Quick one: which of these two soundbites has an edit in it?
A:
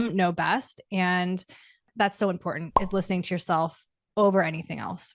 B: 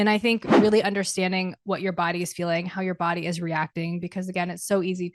A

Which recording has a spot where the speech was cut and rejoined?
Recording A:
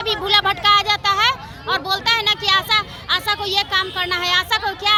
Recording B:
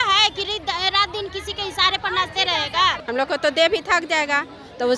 B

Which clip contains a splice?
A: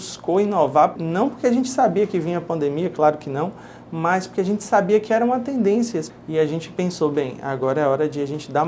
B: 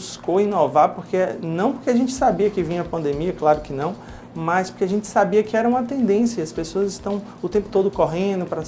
A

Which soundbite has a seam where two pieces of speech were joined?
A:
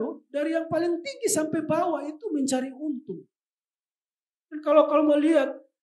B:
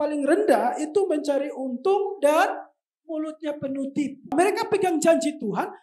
B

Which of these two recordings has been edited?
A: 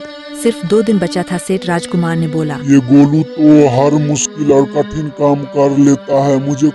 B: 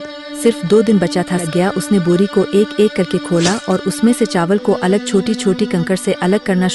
B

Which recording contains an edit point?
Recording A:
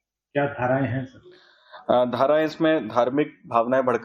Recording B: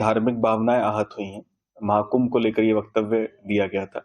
A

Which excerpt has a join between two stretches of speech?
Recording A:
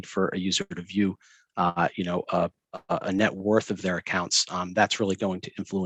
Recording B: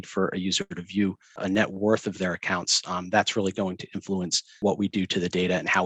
B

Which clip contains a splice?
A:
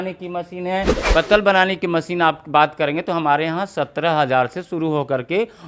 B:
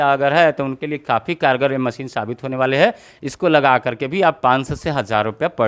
A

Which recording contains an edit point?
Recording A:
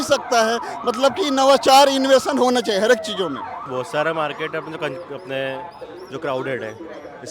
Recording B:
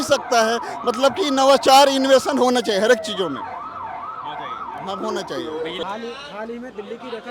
A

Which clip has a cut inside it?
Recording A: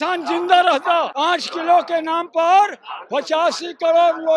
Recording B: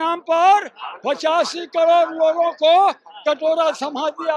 A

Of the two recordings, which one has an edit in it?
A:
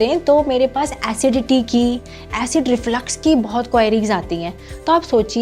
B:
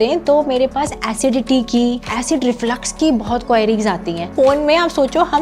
B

